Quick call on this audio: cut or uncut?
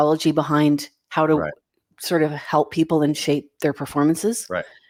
uncut